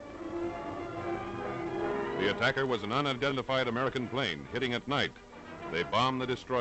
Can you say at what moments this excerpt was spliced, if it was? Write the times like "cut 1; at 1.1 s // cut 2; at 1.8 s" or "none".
cut 1; at 3.5 s